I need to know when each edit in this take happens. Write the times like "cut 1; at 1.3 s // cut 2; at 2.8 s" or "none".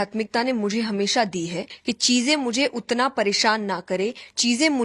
cut 1; at 1.7 s